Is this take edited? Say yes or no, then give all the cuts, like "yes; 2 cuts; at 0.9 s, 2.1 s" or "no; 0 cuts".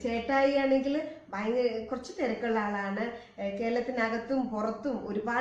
no; 0 cuts